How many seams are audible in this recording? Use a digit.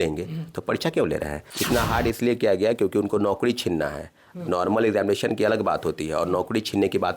1